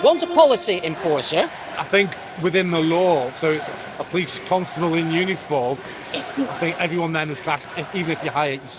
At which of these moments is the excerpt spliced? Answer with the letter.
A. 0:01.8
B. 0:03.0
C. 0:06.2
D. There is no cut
A